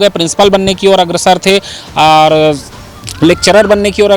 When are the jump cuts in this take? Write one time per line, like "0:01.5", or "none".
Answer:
none